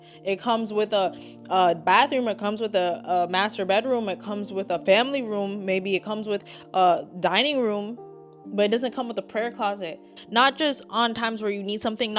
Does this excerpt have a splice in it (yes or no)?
yes